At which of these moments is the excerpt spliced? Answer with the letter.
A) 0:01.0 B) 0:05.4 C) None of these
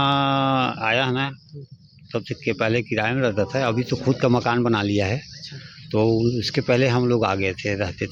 C